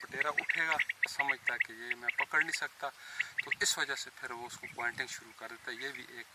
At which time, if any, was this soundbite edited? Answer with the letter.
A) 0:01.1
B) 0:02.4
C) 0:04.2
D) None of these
A